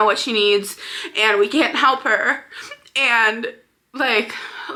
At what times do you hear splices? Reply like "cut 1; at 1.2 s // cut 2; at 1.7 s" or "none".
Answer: none